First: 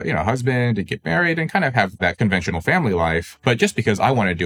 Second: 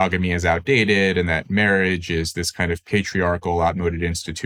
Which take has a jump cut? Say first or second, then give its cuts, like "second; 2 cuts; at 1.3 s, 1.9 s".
first; 2 cuts; at 2.0 s, 3.3 s